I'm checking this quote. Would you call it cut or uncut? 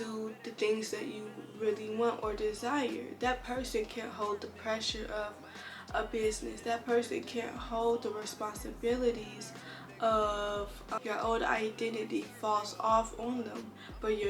cut